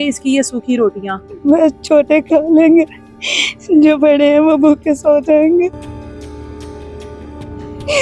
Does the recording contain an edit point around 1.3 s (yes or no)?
yes